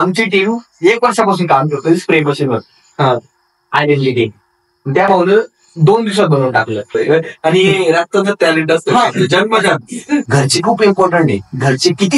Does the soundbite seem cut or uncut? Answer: cut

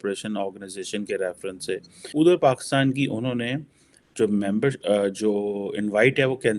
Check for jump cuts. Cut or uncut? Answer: cut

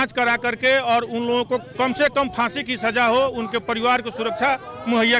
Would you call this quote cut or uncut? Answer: uncut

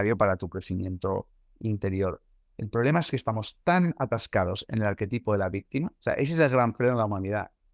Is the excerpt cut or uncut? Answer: cut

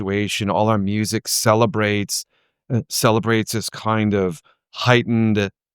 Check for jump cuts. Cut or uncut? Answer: cut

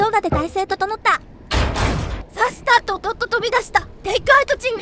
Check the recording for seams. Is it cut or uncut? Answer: cut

